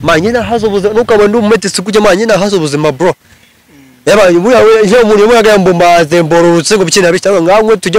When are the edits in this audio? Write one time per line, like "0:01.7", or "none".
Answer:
none